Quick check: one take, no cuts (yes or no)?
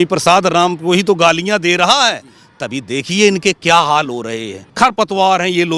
no